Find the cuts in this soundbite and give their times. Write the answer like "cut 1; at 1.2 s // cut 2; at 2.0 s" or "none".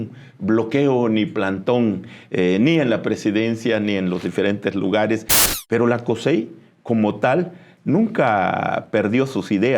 cut 1; at 5.4 s